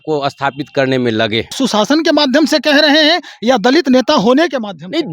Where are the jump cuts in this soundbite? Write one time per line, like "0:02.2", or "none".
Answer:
0:01.6